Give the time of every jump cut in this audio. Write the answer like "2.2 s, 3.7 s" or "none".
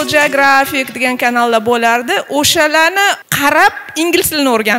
3.3 s